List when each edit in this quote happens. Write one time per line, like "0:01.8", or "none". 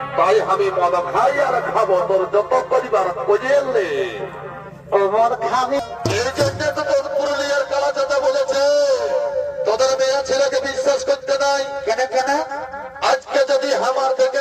0:05.8